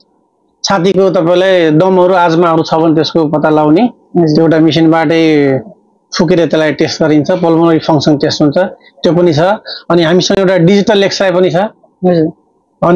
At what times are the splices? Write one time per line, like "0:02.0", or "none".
none